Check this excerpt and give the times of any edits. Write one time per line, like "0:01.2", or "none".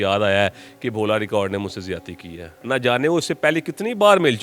0:02.5

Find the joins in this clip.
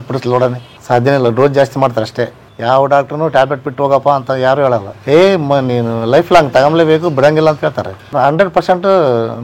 0:04.9
0:08.1

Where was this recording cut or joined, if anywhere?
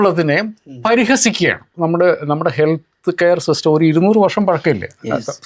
0:01.7

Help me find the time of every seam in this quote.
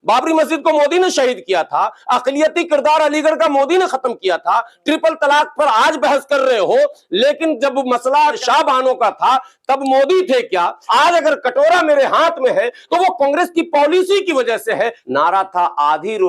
0:08.4
0:10.8
0:15.0

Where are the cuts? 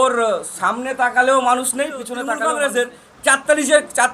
0:02.2

